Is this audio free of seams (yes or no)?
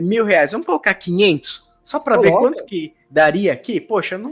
yes